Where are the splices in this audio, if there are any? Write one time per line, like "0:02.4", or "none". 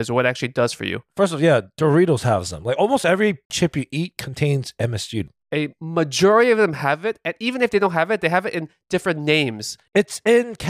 0:03.5
0:05.3